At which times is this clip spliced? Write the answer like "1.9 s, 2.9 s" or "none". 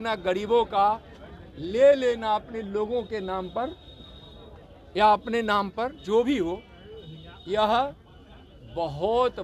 none